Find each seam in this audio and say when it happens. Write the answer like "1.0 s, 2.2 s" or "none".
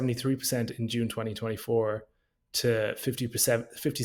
none